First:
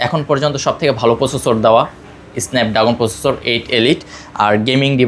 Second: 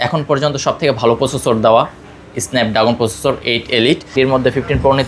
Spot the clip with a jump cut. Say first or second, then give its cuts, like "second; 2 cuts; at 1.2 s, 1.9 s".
second; 1 cut; at 4.1 s